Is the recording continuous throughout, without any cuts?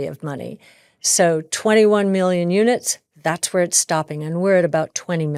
yes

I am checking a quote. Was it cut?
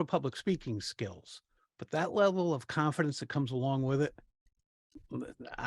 no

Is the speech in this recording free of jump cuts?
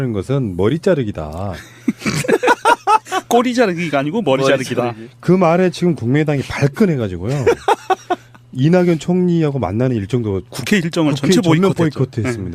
yes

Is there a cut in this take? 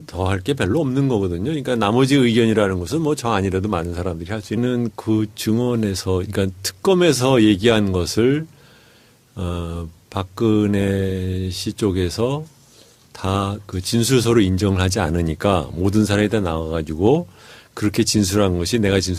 no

